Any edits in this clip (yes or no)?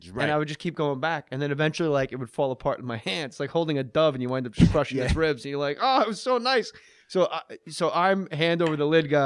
yes